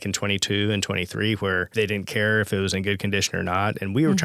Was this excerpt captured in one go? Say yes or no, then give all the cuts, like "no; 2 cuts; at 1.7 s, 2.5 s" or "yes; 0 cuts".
no; 1 cut; at 1.7 s